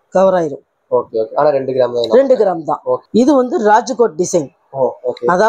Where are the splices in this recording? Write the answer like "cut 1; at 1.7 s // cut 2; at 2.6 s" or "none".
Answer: cut 1; at 3.0 s